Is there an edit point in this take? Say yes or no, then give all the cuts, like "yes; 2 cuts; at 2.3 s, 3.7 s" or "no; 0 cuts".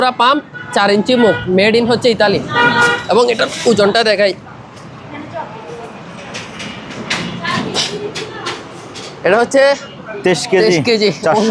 no; 0 cuts